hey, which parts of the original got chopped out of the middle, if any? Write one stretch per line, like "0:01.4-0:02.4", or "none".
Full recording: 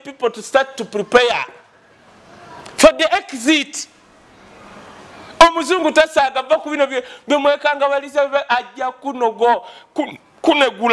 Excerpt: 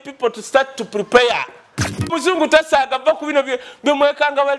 0:02.1-0:05.6